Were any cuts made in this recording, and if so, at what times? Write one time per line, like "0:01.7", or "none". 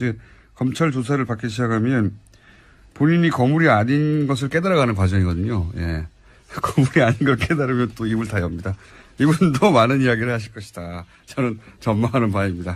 0:09.6